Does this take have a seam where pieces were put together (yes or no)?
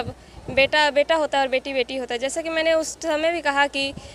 no